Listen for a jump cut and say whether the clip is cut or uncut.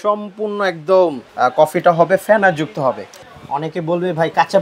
cut